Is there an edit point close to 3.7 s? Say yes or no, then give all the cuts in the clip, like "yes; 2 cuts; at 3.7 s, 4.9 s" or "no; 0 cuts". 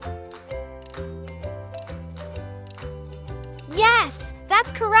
yes; 1 cut; at 3.7 s